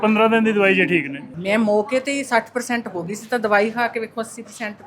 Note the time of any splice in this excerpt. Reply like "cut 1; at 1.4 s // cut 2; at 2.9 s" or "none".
cut 1; at 1.2 s